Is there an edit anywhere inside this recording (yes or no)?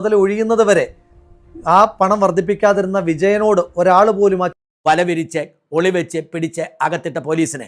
yes